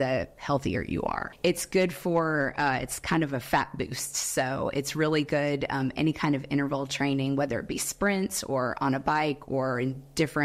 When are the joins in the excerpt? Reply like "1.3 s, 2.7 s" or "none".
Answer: none